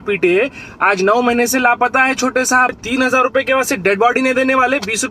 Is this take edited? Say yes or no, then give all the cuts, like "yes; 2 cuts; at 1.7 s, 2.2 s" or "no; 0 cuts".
yes; 1 cut; at 2.8 s